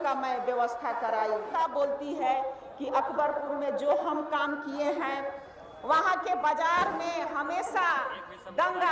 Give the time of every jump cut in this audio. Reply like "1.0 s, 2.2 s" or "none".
1.5 s